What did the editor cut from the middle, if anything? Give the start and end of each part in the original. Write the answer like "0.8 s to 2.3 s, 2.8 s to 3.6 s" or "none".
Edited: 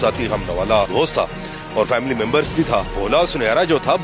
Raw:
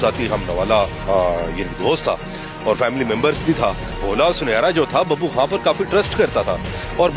0.9 s to 1.8 s, 3.8 s to 4.0 s